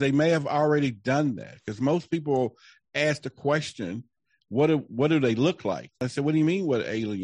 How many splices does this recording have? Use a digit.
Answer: 1